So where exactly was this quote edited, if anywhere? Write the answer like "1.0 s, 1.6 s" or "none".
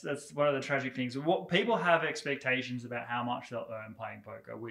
none